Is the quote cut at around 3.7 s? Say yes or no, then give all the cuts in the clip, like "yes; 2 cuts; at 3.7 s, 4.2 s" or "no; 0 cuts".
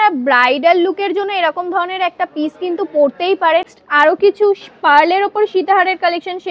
yes; 1 cut; at 3.7 s